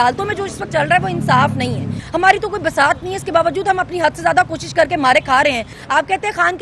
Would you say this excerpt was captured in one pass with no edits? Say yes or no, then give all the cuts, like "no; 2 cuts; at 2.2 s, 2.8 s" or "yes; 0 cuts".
no; 2 cuts; at 1.9 s, 5.7 s